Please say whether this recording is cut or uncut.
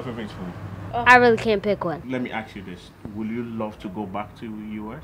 cut